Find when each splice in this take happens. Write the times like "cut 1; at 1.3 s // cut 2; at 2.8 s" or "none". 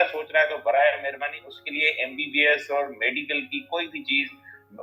none